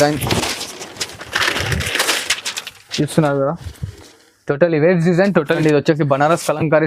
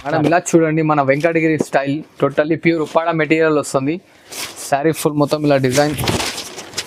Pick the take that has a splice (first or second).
first